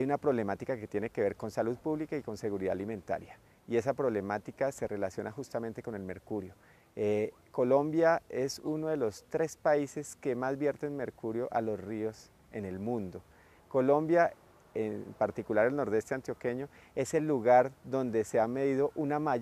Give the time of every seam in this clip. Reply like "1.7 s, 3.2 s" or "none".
13.9 s